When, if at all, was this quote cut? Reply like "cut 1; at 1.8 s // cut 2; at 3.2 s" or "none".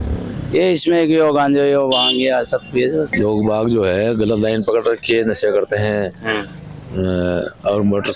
cut 1; at 3.1 s